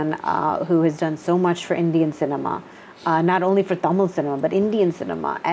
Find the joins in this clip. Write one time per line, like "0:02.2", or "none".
none